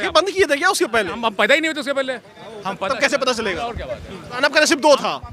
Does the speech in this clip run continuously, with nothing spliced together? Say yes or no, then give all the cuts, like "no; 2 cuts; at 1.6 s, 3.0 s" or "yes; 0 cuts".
no; 1 cut; at 4.4 s